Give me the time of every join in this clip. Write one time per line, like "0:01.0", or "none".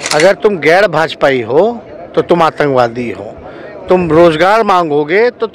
none